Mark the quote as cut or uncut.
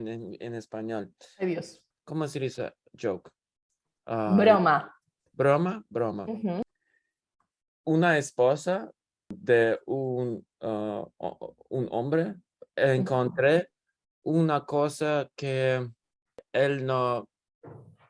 cut